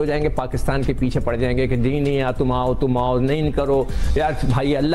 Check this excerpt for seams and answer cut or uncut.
uncut